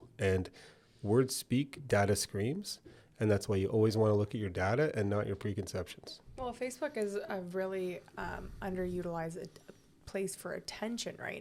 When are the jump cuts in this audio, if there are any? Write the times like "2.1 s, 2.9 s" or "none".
none